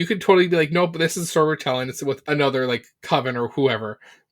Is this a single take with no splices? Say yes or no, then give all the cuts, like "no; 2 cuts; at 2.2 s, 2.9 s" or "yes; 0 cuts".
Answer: no; 1 cut; at 2.2 s